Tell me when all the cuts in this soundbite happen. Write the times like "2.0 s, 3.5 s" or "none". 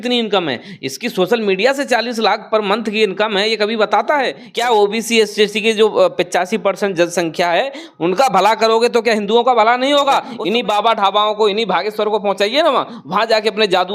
4.4 s, 10.3 s